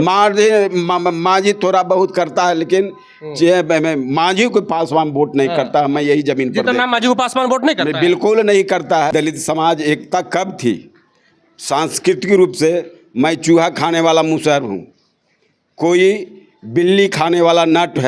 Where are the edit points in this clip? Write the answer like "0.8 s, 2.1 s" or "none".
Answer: 9.1 s